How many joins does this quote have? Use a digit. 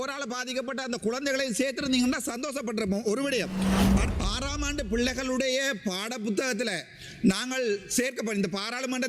1